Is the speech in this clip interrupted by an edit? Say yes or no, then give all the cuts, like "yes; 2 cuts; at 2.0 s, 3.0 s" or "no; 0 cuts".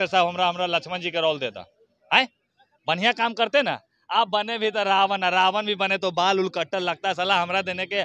no; 0 cuts